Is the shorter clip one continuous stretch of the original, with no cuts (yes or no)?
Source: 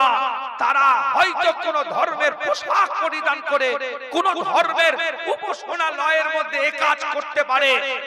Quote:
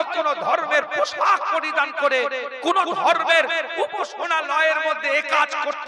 yes